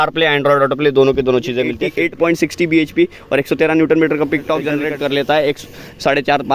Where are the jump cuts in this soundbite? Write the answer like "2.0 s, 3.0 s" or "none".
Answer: 1.8 s, 4.8 s